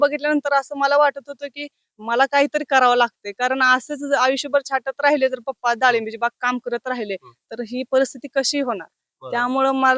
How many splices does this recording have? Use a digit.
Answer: 0